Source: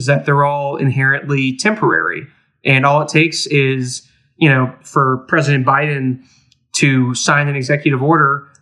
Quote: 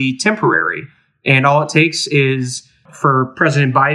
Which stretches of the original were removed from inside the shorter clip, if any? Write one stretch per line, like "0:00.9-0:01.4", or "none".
0:04.3-0:04.8

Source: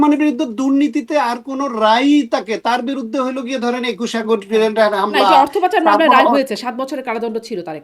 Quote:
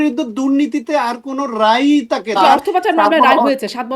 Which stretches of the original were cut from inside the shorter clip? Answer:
0:02.6-0:05.3

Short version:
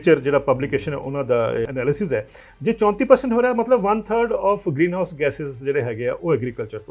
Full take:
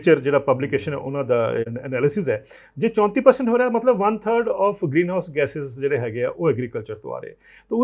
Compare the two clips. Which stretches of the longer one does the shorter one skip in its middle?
0:01.7-0:01.9

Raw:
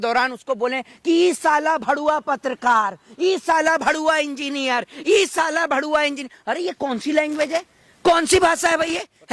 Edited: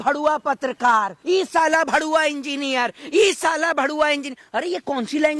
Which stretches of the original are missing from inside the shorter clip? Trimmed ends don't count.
0:03.0-0:03.1

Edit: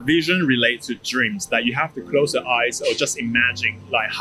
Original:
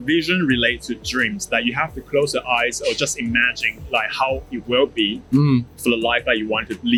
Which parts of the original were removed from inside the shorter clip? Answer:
none

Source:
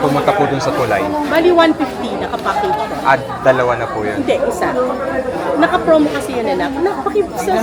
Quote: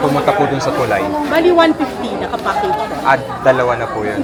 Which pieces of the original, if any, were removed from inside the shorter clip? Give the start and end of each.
none

